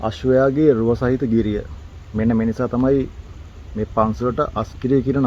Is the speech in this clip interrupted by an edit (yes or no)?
no